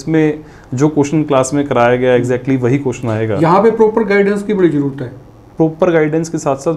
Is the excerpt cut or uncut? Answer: uncut